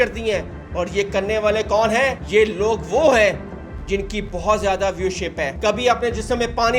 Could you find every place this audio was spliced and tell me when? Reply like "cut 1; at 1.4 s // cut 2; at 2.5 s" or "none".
cut 1; at 2.2 s // cut 2; at 5.5 s